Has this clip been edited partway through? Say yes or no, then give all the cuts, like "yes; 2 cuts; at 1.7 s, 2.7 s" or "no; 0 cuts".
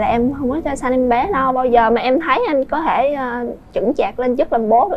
no; 0 cuts